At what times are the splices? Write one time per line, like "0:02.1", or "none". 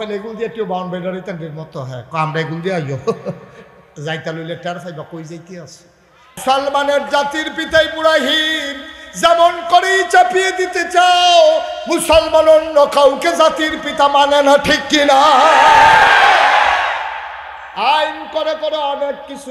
0:06.4